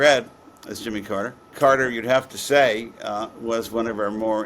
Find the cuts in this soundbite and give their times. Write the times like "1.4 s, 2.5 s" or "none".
1.4 s